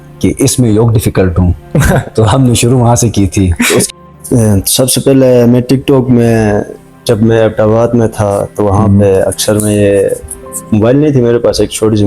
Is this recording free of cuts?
no; 1 cut; at 3.9 s

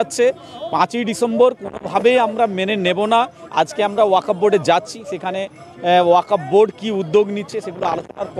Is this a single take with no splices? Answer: yes; 0 cuts

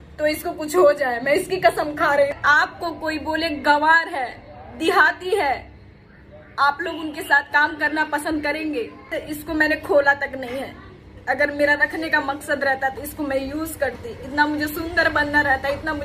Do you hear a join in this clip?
yes; 2 cuts; at 2.4 s, 9.1 s

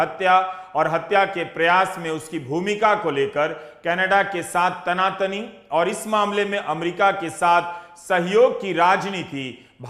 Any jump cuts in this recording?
no; 0 cuts

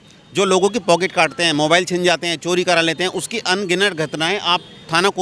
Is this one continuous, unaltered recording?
yes; 0 cuts

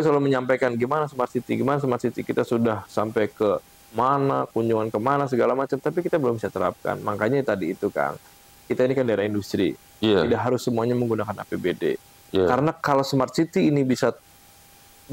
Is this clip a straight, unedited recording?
yes; 0 cuts

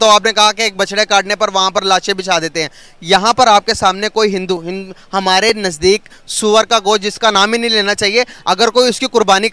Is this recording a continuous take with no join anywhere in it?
yes; 0 cuts

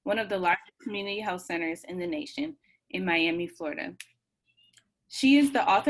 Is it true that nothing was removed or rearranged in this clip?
yes; 0 cuts

